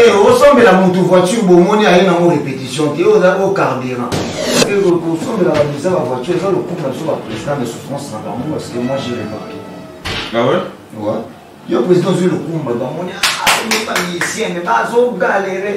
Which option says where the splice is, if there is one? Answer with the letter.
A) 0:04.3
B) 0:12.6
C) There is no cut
A